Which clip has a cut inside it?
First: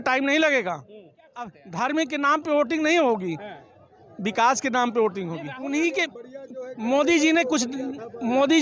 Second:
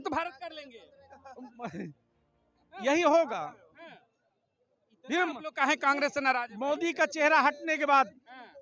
first; 2 cuts; at 1.6 s, 5.4 s

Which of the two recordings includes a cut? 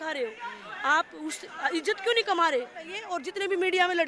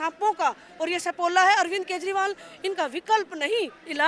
first; 1 cut; at 3.0 s

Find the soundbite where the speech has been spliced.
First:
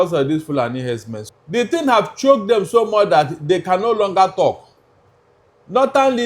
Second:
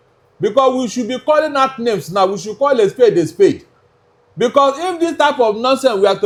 first; 1 cut; at 1.1 s

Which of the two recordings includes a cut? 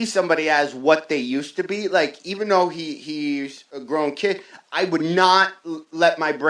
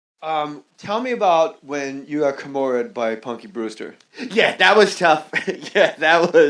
second; 1 cut; at 3.2 s

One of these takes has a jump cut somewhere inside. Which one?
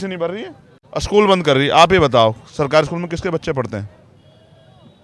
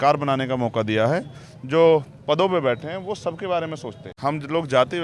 second; 1 cut; at 4.1 s

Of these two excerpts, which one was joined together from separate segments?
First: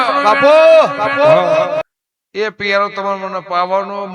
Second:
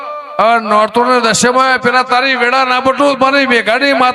first; 1 cut; at 1.8 s

